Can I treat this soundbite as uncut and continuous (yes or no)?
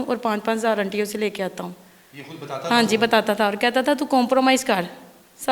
yes